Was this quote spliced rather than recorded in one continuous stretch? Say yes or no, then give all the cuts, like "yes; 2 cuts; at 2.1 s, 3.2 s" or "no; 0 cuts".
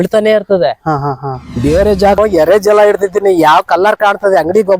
yes; 1 cut; at 2.2 s